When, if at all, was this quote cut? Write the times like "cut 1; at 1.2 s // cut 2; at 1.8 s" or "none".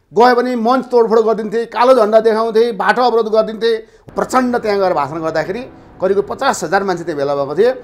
cut 1; at 4.0 s